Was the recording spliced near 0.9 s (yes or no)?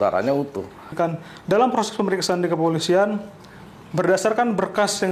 yes